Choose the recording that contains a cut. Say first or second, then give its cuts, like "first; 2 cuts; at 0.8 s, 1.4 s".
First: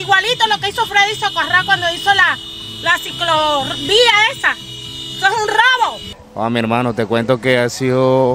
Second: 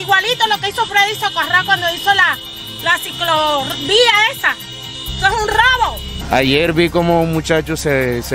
second; 1 cut; at 6.1 s